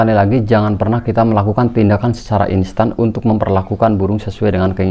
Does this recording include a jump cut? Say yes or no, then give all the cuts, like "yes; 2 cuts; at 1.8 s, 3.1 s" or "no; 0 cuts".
no; 0 cuts